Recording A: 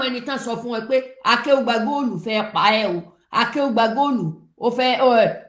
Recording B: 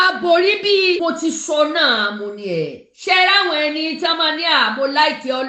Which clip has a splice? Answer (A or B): B